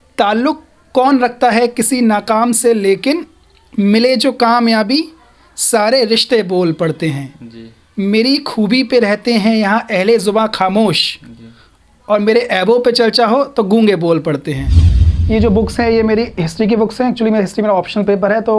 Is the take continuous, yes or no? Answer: no